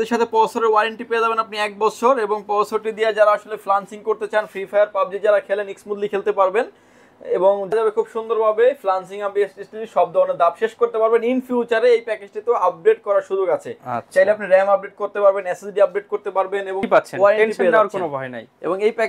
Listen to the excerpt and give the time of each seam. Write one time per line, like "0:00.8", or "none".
0:07.7
0:16.8